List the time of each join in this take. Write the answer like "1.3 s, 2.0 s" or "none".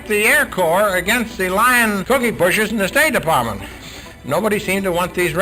2.0 s, 3.9 s